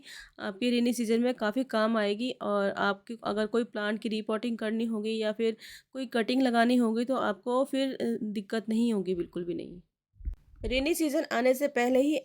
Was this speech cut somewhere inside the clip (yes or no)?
no